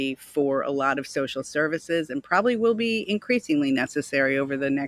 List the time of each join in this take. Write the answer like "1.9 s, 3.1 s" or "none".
none